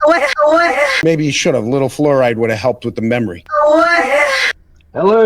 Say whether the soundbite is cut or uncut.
cut